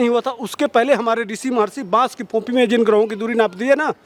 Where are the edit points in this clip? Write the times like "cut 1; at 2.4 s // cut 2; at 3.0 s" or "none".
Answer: none